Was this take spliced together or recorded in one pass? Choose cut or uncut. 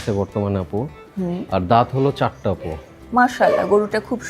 cut